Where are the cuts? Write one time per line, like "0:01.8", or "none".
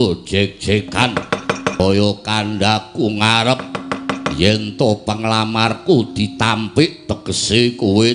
0:01.8